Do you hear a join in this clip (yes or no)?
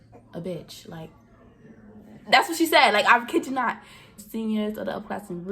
yes